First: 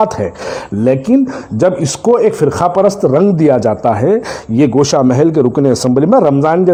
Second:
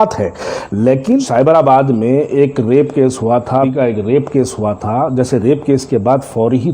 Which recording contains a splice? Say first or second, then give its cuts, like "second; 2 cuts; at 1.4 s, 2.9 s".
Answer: second; 2 cuts; at 1.3 s, 3.7 s